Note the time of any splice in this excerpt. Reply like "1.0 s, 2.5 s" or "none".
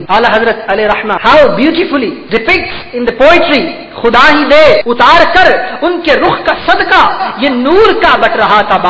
1.1 s, 2.2 s, 4.8 s